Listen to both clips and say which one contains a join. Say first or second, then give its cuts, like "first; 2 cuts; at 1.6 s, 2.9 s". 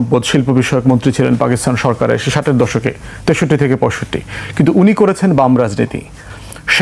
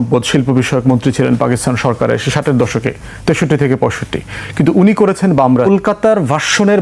second; 1 cut; at 5.7 s